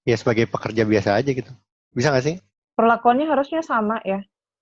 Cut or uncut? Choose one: cut